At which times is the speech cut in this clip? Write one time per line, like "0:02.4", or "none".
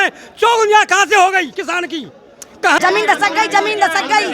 0:02.8